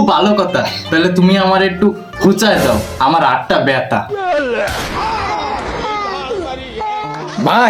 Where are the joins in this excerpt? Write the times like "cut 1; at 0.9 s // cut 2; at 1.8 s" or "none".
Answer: none